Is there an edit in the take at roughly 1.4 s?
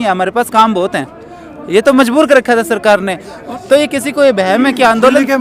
no; 1 cut; at 3.4 s

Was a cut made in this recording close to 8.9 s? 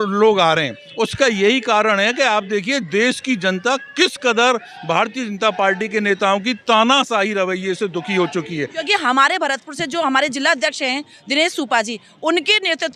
yes; 1 cut; at 8.9 s

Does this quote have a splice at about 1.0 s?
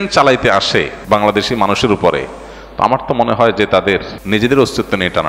yes; 2 cuts; at 1.0 s, 4.1 s

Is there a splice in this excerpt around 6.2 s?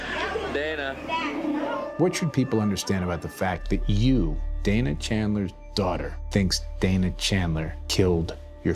yes; 1 cut; at 6.2 s

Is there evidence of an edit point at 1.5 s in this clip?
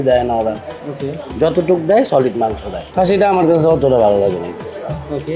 no; 1 cut; at 2.8 s

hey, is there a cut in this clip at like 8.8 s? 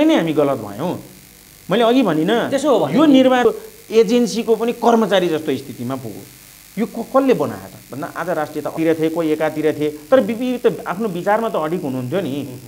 yes; 2 cuts; at 3.4 s, 8.8 s

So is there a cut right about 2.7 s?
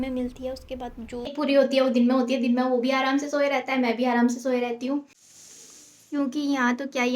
no; 2 cuts; at 1.4 s, 5.2 s

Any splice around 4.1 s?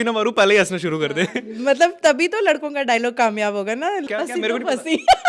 yes; 1 cut; at 4.1 s

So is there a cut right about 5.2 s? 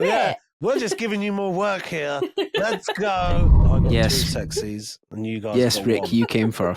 no; 1 cut; at 3.7 s

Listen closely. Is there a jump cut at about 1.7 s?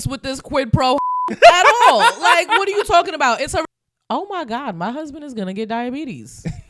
no; 1 cut; at 3.6 s

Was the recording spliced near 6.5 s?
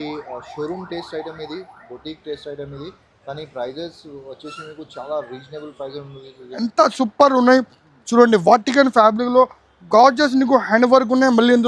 yes; 1 cut; at 6.5 s

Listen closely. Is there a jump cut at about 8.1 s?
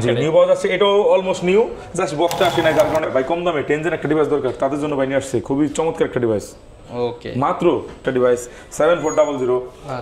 yes; 2 cuts; at 3.1 s, 8.1 s

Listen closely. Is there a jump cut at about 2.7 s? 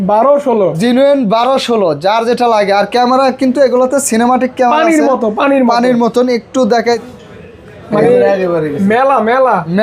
no; 1 cut; at 6.8 s

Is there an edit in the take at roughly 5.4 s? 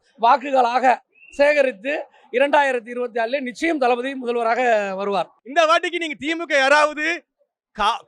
yes; 1 cut; at 5.4 s

